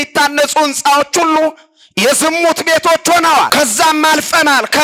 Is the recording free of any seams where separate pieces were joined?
no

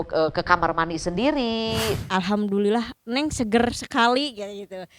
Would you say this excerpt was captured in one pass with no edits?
no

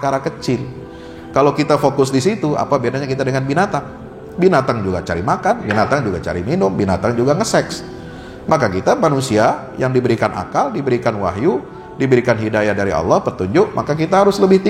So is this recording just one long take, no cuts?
yes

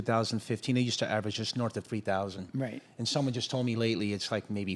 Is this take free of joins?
yes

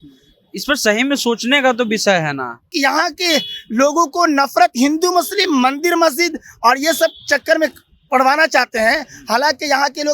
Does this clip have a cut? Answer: yes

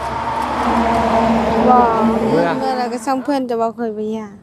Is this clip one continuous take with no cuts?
no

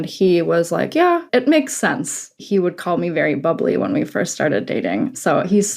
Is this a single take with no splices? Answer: no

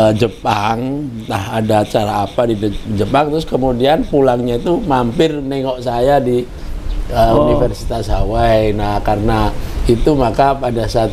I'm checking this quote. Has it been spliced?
no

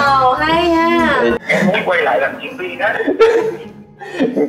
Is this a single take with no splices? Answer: no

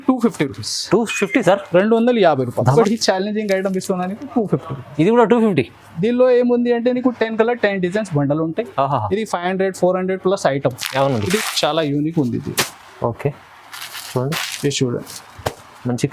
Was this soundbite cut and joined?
yes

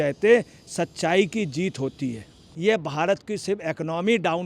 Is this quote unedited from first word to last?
no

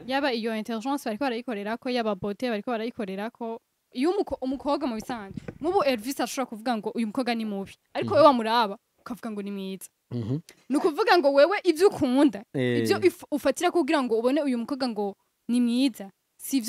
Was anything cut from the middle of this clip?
yes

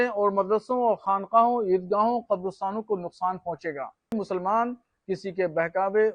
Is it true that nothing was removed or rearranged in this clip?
no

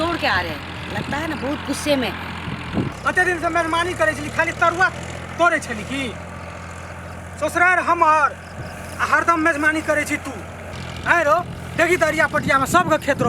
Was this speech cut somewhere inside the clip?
yes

